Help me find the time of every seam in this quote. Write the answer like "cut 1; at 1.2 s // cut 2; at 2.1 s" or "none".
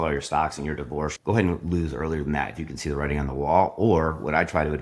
cut 1; at 1.2 s